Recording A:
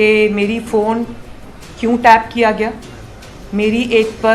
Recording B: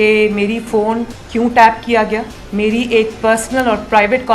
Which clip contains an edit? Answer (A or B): B